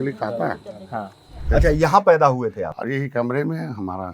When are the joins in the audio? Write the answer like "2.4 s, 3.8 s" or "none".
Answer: 1.4 s, 2.7 s